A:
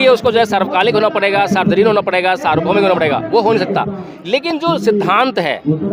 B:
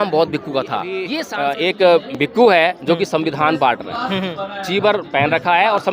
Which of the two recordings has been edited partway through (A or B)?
B